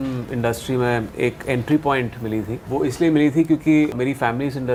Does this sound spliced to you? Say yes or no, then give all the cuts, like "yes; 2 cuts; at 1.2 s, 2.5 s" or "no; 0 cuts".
no; 0 cuts